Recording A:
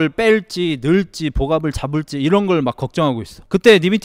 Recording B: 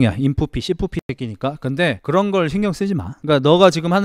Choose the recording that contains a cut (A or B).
B